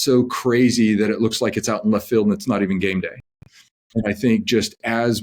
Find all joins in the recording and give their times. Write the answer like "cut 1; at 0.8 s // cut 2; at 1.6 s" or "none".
none

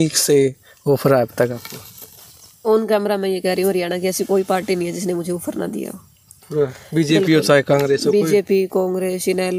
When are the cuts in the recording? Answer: none

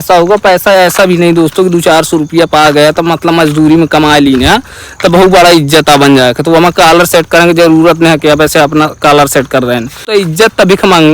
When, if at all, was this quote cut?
cut 1; at 10.1 s

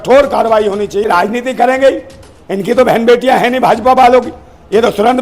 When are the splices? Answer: cut 1; at 1.0 s

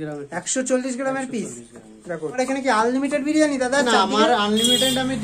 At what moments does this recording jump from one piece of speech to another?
cut 1; at 2.4 s

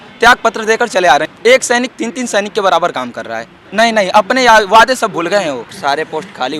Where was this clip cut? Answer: cut 1; at 1.3 s // cut 2; at 3.6 s // cut 3; at 5.7 s

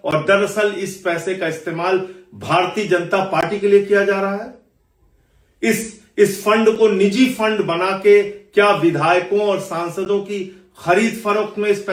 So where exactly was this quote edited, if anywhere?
none

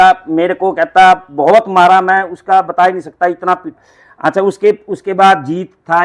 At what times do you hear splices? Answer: cut 1; at 3.7 s

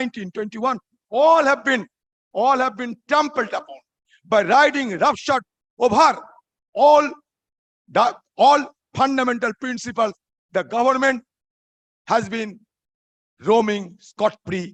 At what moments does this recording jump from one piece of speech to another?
none

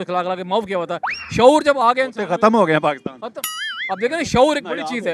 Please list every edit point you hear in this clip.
none

